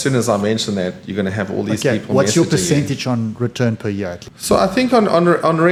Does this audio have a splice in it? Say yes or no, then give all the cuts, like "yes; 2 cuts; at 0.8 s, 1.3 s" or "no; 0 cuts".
no; 0 cuts